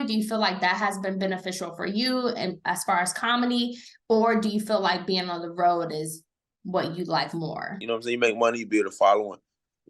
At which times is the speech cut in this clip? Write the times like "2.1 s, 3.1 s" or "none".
7.8 s